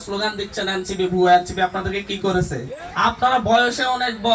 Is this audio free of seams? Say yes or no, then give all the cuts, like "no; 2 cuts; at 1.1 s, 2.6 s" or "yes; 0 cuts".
no; 1 cut; at 2.8 s